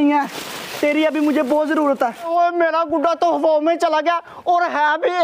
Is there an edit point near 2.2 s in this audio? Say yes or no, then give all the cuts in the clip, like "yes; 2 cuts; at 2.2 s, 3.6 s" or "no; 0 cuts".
yes; 1 cut; at 2.2 s